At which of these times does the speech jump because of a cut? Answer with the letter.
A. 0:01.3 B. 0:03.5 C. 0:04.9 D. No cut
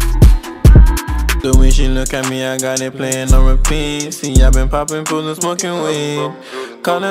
A